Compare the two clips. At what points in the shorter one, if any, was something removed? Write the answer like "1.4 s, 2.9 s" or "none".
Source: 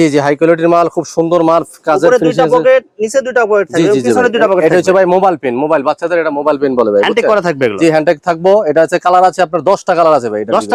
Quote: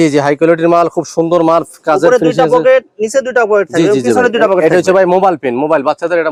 none